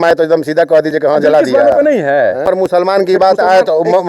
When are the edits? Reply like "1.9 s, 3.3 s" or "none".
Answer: 2.4 s